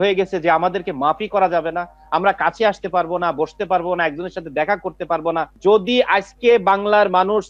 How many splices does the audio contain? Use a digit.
0